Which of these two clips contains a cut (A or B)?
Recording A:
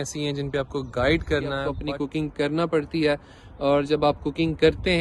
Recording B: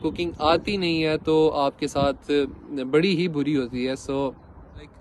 A